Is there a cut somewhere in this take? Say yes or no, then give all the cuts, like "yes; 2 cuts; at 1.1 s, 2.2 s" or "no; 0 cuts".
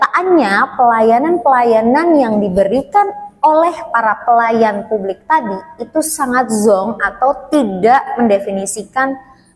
no; 0 cuts